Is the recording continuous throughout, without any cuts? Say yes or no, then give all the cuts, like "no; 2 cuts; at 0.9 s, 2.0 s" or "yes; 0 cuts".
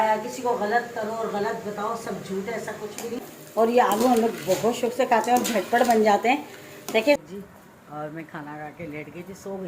no; 2 cuts; at 3.2 s, 7.2 s